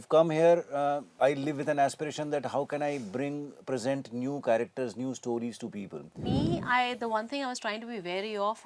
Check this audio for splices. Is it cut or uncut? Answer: cut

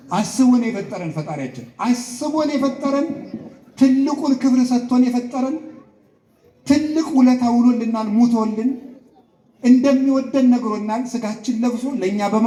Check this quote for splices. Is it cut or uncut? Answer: uncut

